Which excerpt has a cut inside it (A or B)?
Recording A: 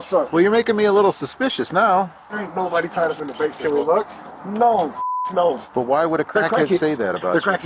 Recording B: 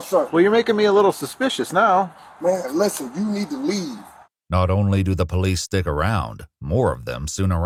A